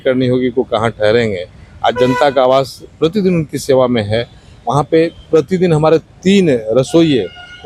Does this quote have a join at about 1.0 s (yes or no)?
no